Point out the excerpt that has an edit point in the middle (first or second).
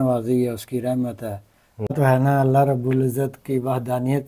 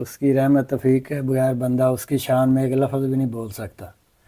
first